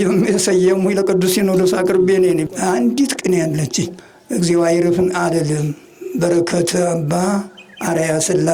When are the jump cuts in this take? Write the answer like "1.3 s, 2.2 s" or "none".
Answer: 2.5 s, 3.9 s

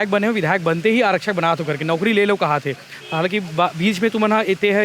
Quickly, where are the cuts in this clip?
none

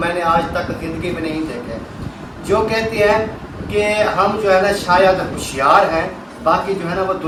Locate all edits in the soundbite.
none

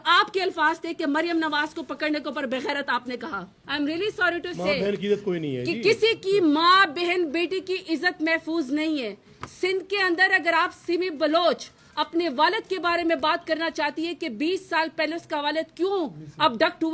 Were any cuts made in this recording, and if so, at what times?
3.5 s

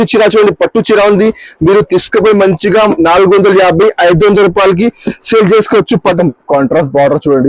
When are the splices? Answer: 6.1 s

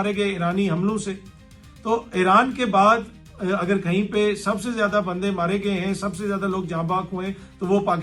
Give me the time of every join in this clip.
none

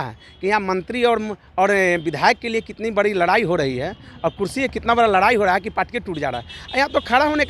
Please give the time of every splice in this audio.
none

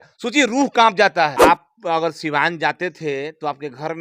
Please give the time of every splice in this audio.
1.3 s

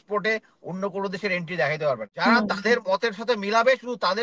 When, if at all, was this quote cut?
2.1 s

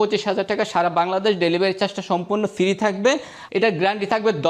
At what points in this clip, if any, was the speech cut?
3.3 s

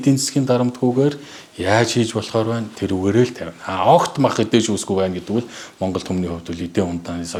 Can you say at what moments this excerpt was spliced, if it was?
none

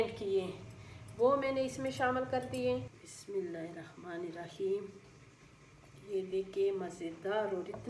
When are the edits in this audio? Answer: 3.0 s

